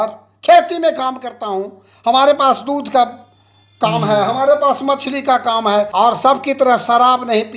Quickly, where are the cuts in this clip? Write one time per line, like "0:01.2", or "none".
none